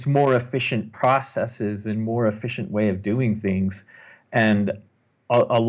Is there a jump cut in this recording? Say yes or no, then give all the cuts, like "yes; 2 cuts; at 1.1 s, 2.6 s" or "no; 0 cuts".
no; 0 cuts